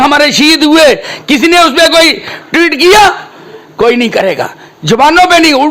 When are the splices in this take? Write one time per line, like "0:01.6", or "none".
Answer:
none